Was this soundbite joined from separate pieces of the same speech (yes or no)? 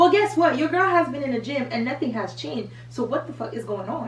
no